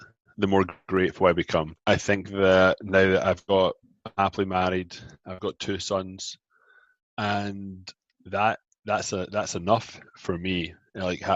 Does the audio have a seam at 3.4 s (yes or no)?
no